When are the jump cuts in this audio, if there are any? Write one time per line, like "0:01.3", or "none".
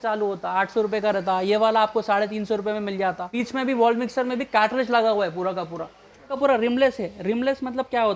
0:03.3
0:06.3